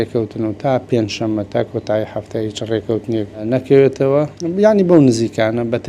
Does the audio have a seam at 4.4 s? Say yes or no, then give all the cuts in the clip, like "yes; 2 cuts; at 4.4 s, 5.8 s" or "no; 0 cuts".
yes; 2 cuts; at 3.4 s, 4.4 s